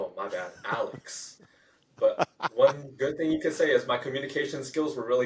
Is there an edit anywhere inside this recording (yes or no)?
no